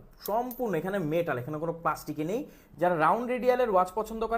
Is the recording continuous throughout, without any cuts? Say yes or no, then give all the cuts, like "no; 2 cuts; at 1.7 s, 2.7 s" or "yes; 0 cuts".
no; 1 cut; at 2.6 s